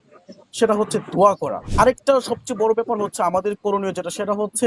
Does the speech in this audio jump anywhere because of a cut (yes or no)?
yes